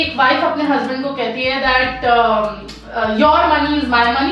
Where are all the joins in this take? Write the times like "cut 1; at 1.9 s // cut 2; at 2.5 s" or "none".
none